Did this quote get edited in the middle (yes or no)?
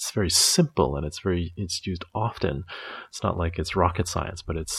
no